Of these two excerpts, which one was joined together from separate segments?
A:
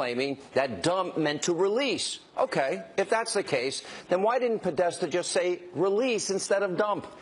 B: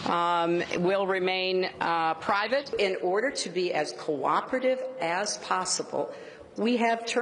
A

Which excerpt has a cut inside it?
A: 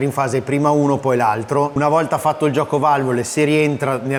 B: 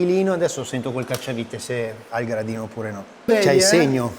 B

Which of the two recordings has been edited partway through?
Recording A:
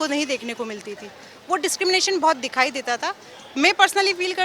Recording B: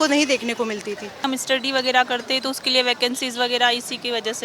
B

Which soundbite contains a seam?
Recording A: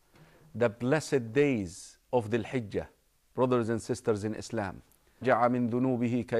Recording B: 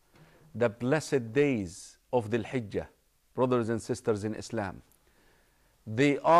B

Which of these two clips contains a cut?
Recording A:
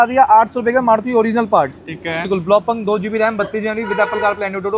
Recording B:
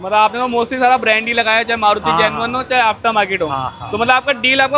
A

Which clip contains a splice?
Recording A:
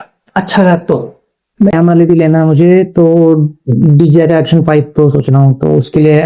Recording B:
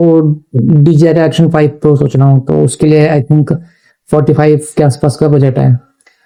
A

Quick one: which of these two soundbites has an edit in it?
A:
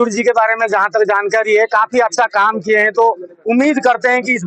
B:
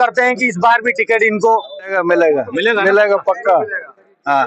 B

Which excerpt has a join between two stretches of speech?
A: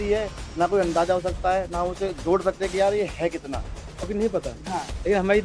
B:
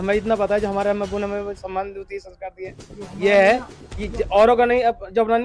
A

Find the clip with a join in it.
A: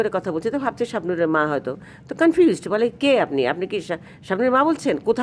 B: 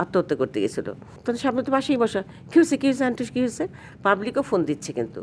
B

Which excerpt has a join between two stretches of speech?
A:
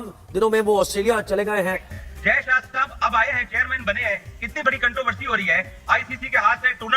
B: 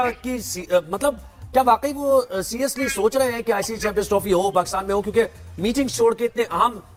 A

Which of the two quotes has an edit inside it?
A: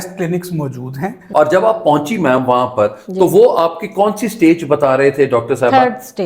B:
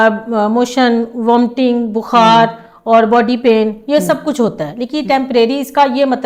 A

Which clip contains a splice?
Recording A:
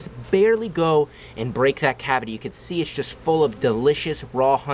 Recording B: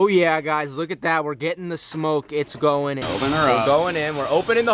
B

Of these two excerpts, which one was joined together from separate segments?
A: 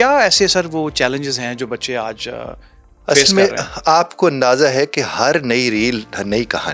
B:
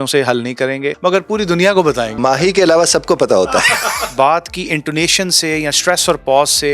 B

